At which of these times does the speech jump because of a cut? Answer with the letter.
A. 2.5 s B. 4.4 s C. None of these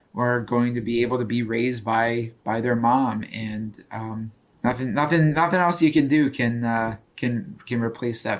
B